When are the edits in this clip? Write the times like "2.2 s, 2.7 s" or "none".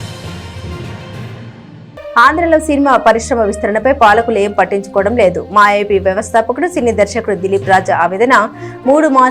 1.6 s